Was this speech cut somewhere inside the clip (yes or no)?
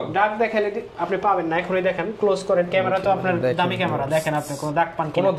no